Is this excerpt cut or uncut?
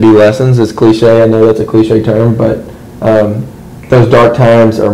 uncut